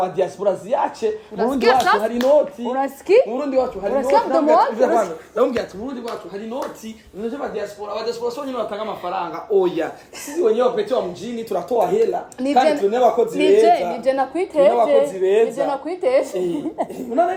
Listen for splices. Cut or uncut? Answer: uncut